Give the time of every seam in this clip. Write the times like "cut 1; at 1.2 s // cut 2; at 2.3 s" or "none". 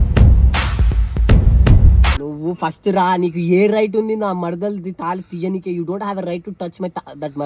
cut 1; at 2.2 s